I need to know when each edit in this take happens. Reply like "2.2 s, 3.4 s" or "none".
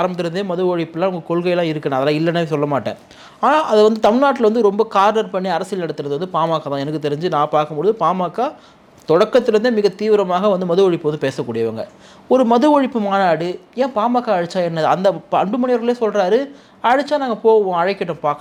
none

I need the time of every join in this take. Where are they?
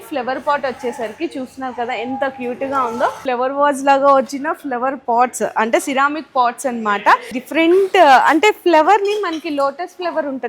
3.2 s, 7.4 s

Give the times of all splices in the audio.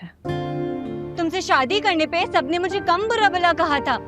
1.1 s

